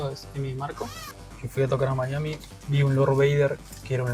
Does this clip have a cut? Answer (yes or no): no